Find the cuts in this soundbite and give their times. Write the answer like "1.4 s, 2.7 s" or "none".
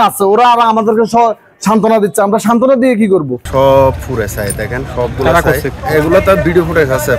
3.4 s, 5.8 s